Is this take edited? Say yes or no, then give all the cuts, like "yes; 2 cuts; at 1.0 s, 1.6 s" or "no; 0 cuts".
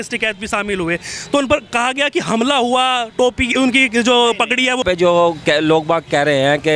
yes; 1 cut; at 4.8 s